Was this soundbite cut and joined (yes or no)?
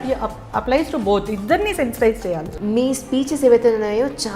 yes